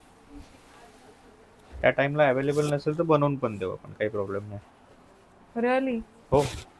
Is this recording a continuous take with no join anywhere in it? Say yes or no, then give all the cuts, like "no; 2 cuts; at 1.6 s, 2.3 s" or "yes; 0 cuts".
yes; 0 cuts